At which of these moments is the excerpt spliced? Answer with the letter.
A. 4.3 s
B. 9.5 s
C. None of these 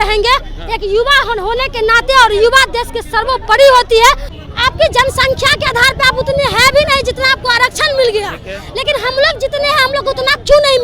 A